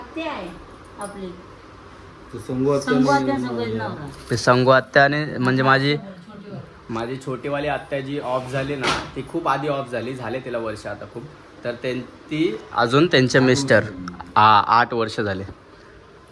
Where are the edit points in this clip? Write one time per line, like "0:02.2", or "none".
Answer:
none